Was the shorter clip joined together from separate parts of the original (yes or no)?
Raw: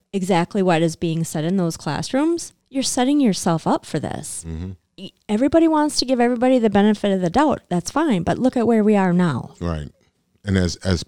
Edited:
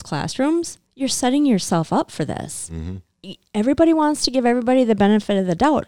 no